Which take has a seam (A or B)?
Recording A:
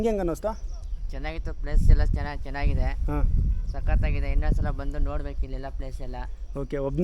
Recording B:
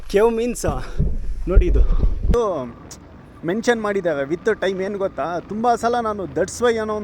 B